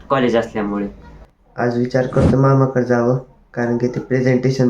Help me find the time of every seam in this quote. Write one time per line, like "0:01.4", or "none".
0:01.1

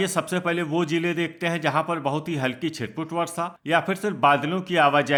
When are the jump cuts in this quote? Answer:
none

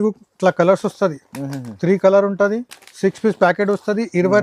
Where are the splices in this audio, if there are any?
none

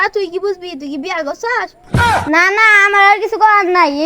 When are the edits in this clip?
0:01.8

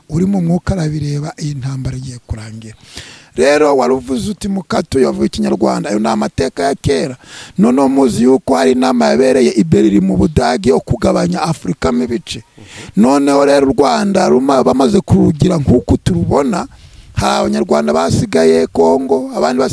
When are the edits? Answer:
0:04.8

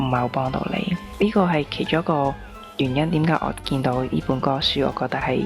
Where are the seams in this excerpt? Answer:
0:01.1

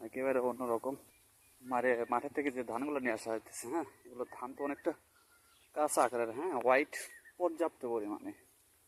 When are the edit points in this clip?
none

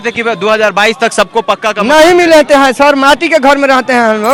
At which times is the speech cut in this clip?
none

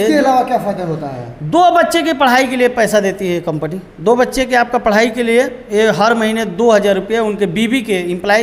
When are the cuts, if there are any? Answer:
none

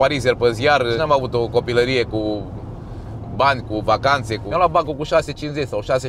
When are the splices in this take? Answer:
0:01.0
0:04.4

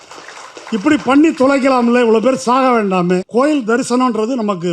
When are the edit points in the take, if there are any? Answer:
0:03.3

